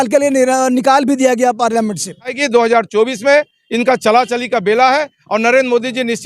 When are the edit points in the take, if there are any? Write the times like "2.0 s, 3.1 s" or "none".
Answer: 2.4 s